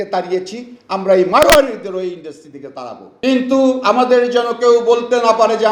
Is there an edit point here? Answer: yes; 1 cut; at 3.1 s

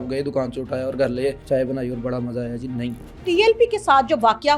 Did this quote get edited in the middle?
yes; 2 cuts; at 1.4 s, 3.2 s

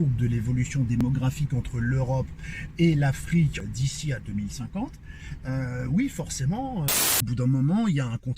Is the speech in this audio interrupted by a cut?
yes; 2 cuts; at 3.6 s, 7.2 s

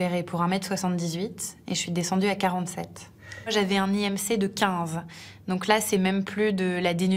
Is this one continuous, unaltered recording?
no; 1 cut; at 3.5 s

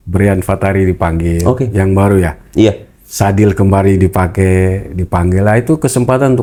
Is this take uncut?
yes; 0 cuts

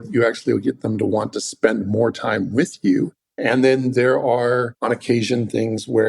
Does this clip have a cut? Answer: yes; 2 cuts; at 3.2 s, 4.7 s

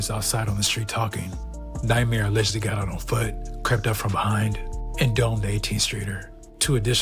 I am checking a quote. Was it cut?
no; 0 cuts

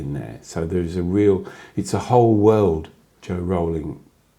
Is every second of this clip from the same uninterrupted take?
no; 1 cut; at 3.1 s

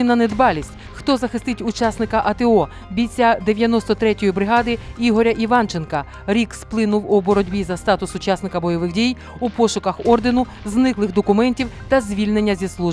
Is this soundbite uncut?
yes; 0 cuts

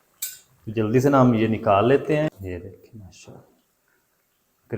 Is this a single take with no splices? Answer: no; 1 cut; at 2.5 s

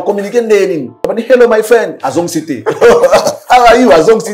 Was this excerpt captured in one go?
no; 1 cut; at 1.0 s

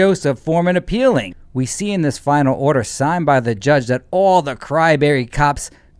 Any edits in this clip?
no; 0 cuts

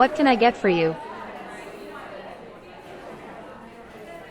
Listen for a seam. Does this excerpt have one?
yes; 1 cut; at 0.9 s

